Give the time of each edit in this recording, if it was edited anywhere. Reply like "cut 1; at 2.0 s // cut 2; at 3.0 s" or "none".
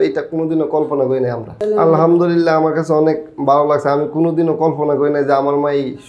cut 1; at 1.5 s